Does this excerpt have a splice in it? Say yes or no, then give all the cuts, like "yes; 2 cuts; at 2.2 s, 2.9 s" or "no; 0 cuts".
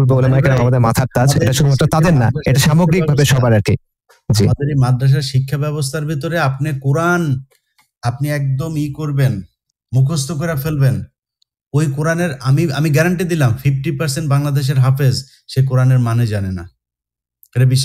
no; 0 cuts